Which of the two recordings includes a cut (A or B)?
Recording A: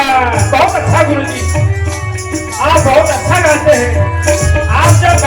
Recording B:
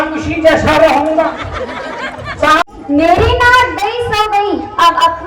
B